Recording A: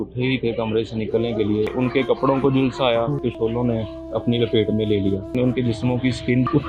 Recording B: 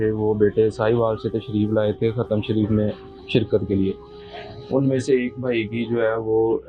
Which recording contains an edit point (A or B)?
A